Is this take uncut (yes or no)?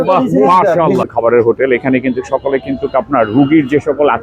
no